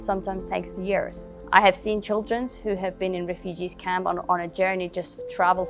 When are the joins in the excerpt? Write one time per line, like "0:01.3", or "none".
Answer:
0:01.2